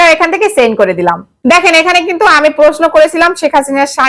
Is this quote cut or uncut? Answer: cut